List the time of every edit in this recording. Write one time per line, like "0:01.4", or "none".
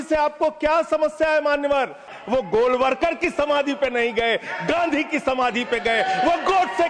0:02.2

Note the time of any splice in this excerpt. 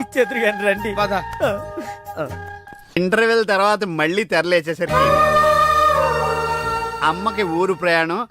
0:03.0

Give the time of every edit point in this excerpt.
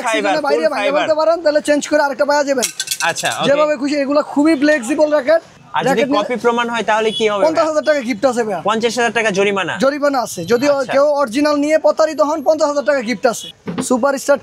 0:05.6
0:13.5

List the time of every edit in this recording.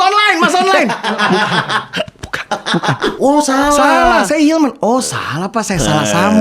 0:03.1

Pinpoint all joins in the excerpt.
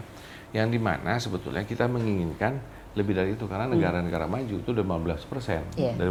none

